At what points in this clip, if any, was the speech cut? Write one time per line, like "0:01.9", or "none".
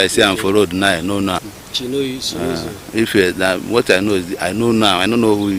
0:01.5